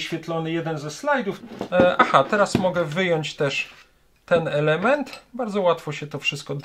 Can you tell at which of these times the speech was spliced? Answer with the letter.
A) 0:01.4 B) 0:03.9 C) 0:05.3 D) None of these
A